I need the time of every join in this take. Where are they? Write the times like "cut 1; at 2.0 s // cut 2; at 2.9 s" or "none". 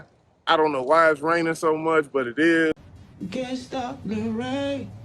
cut 1; at 2.7 s